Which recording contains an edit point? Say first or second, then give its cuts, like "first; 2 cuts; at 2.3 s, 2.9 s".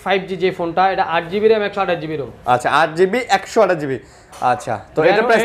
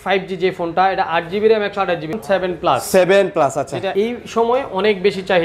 second; 2 cuts; at 2.1 s, 3.9 s